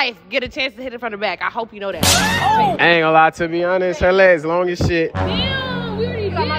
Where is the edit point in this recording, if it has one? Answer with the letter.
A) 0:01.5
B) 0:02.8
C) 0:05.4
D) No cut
B